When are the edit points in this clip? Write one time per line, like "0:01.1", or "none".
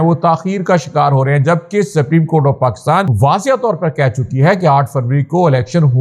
0:03.1